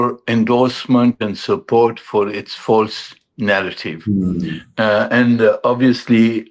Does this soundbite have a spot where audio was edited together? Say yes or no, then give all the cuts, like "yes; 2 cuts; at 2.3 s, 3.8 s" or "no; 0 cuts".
no; 0 cuts